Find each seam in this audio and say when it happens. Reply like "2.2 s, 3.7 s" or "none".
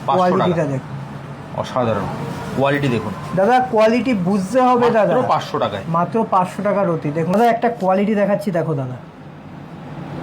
7.3 s